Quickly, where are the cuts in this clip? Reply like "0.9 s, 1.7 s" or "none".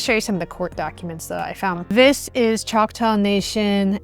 1.8 s